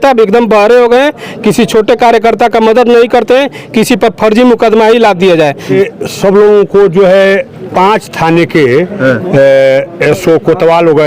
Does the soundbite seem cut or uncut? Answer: cut